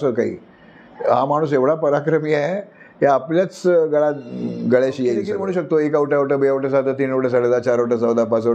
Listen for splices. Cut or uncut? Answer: cut